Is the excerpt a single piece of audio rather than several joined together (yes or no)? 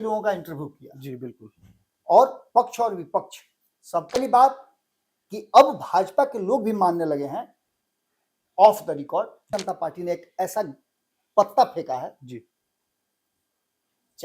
no